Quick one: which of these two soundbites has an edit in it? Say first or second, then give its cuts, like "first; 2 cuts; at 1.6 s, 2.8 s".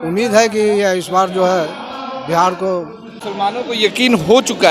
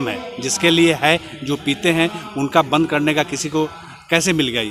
first; 1 cut; at 3.1 s